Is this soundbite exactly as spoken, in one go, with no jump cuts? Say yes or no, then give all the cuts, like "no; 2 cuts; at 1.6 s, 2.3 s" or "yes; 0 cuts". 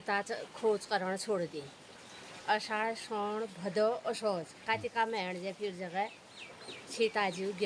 yes; 0 cuts